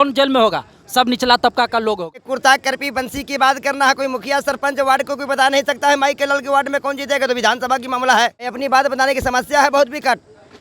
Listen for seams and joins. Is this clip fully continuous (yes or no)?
no